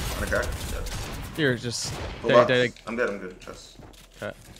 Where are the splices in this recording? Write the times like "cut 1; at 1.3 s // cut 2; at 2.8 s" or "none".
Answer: cut 1; at 1.9 s